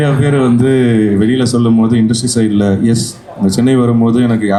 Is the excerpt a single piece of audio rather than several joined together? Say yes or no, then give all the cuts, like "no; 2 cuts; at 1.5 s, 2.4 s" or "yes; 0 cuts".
yes; 0 cuts